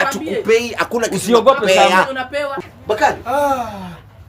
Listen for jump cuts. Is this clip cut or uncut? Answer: cut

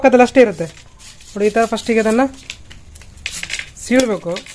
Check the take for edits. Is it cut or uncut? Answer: uncut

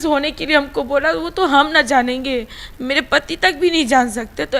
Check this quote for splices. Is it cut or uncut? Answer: uncut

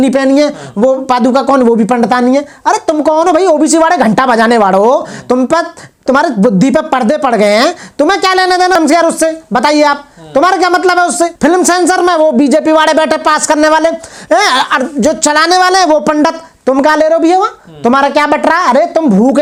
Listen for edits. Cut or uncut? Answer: uncut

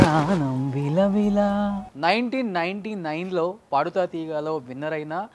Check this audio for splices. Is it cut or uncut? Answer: cut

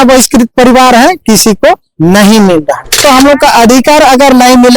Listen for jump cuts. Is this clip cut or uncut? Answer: cut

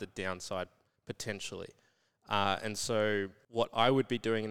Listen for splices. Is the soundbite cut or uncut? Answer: cut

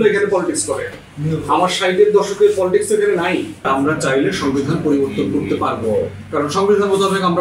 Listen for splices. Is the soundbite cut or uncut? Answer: cut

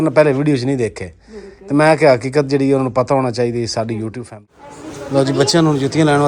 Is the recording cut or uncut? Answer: cut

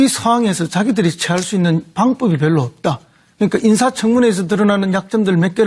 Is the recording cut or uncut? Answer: uncut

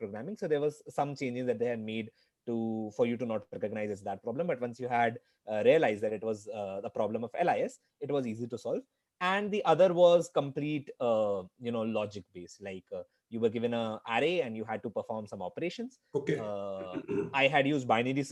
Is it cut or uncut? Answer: uncut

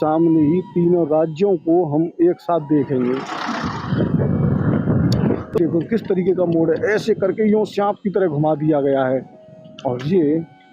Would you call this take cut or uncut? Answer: cut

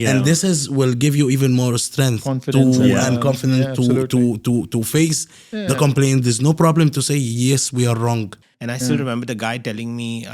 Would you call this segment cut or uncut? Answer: cut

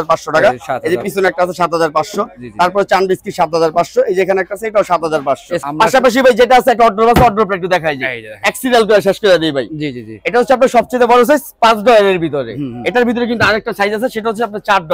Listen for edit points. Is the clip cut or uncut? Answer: uncut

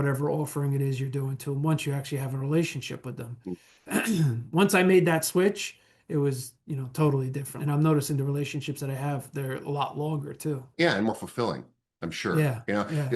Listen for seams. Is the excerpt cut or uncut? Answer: cut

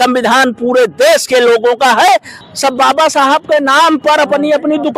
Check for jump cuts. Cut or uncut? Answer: cut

